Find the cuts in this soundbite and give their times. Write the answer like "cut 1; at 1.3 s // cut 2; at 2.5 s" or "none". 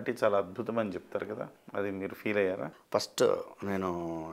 cut 1; at 1.6 s // cut 2; at 2.8 s